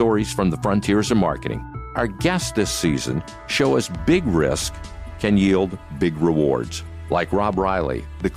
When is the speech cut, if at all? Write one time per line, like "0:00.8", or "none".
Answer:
0:01.4